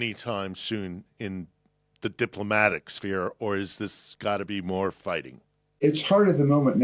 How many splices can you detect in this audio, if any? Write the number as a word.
one